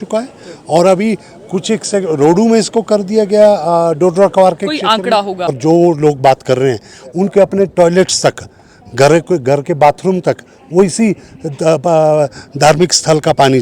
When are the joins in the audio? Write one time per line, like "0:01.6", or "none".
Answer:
0:05.6